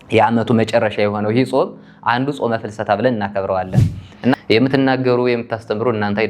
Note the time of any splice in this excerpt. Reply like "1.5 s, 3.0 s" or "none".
4.1 s